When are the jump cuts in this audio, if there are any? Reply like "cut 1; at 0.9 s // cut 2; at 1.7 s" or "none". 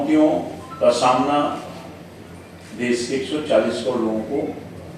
none